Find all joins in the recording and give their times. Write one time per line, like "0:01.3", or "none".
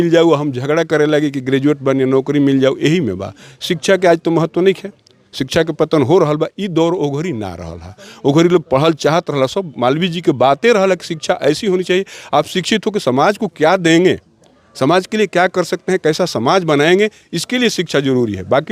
none